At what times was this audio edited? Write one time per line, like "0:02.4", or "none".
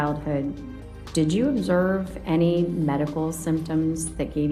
none

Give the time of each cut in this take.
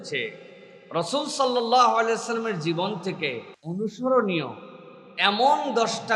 0:03.5

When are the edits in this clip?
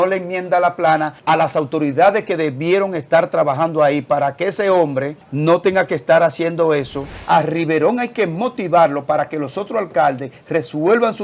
0:01.1
0:05.2
0:07.2

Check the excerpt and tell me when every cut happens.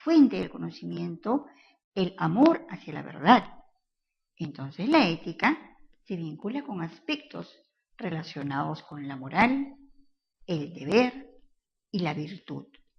0:11.7

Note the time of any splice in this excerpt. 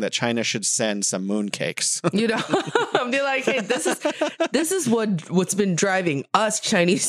none

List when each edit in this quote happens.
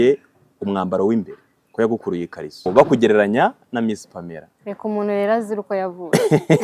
0:02.7

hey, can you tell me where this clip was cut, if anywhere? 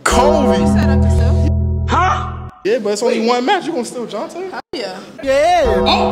none

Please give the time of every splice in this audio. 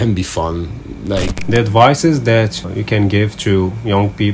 0:01.4
0:02.7

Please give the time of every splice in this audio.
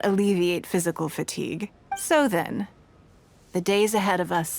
0:01.8

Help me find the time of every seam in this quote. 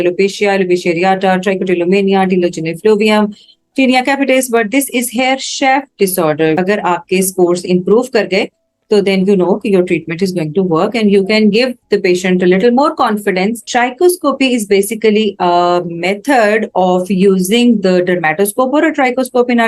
0:06.6
0:13.7

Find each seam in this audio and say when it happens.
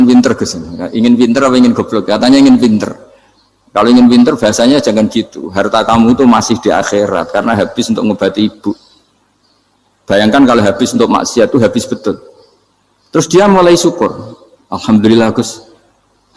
none

